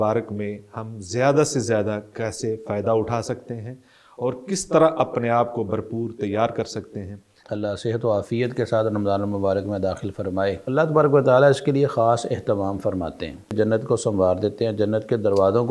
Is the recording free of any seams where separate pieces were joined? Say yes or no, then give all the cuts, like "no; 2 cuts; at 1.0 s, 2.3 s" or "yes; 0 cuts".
no; 3 cuts; at 7.4 s, 10.6 s, 13.5 s